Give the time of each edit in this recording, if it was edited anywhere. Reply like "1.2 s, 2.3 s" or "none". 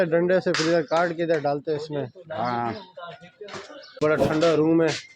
4.0 s